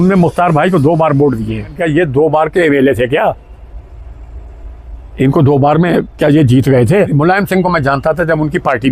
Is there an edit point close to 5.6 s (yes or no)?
no